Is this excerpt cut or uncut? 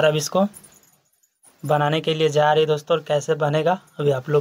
uncut